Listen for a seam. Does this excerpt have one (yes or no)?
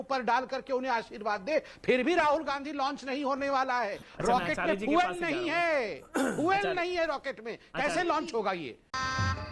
no